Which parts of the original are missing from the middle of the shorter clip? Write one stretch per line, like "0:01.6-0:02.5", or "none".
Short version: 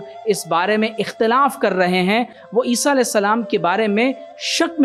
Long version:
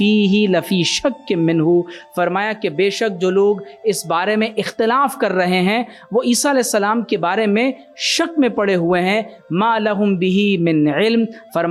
none